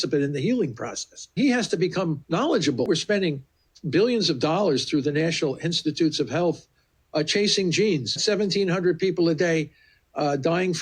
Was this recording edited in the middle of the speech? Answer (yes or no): yes